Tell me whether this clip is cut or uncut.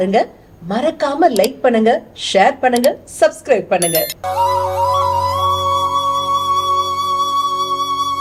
uncut